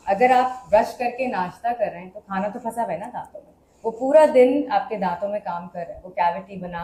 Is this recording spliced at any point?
no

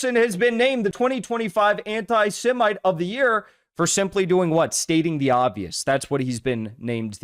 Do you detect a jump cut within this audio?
yes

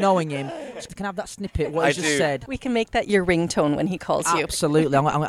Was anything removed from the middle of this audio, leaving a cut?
yes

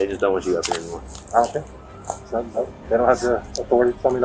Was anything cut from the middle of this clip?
no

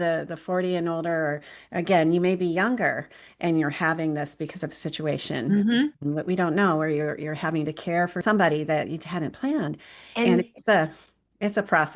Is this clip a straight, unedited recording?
no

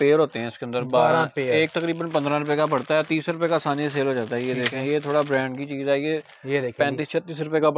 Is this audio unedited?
yes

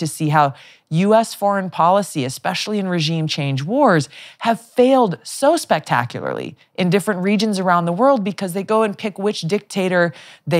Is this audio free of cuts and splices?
yes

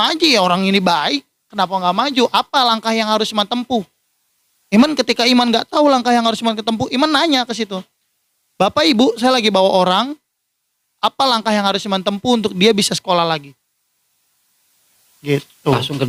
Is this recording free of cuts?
yes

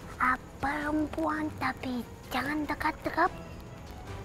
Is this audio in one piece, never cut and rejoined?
yes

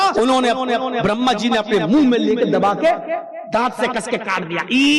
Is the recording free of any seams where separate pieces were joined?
yes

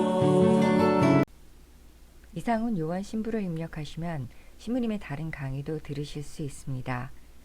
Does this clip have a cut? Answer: yes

